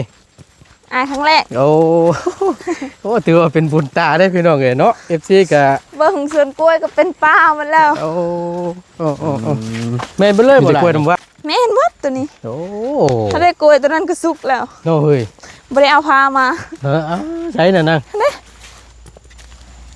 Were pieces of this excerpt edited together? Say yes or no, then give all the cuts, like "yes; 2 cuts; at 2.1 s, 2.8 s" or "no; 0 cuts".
yes; 1 cut; at 9.6 s